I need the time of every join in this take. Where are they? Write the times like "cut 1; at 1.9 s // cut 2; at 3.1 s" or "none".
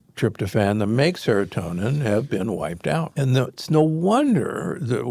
cut 1; at 3.1 s